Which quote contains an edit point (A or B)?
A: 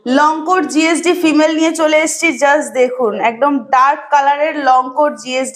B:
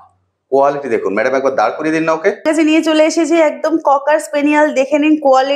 B